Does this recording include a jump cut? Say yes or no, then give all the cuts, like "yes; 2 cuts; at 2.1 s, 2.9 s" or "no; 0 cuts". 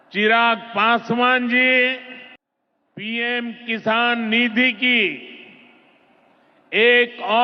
yes; 1 cut; at 2.4 s